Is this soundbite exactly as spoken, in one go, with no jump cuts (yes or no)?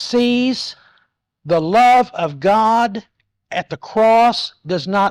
yes